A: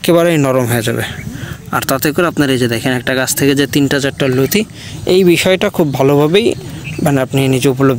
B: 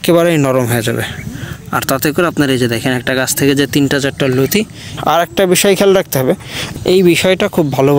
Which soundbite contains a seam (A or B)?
B